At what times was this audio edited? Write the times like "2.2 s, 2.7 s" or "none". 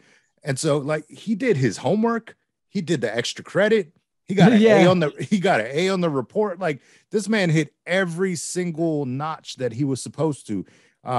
none